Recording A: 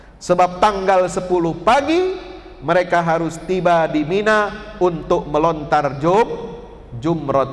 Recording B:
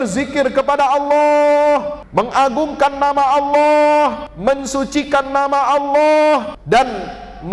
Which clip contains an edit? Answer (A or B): B